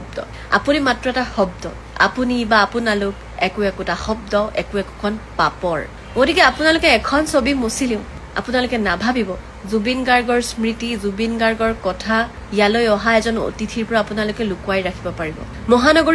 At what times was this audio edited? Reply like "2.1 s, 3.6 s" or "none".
none